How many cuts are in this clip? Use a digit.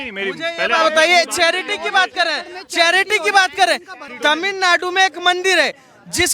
1